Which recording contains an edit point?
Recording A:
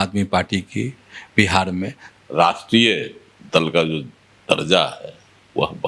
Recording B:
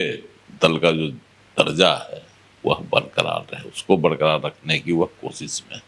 A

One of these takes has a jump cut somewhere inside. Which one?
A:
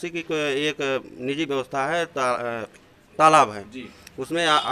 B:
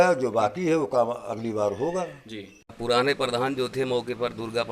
B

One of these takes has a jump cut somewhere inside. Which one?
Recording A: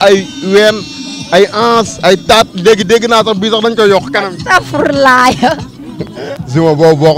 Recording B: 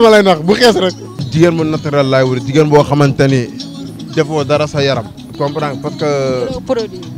B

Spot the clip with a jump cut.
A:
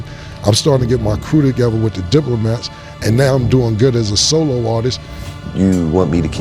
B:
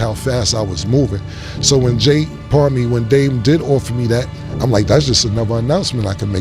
A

